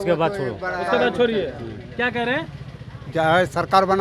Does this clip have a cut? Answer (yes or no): no